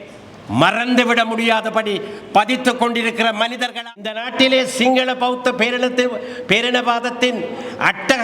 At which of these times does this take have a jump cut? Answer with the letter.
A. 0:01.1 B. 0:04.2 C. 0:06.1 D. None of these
B